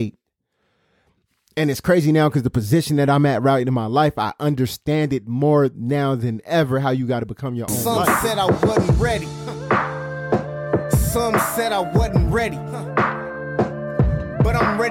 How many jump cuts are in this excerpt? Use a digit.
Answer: 1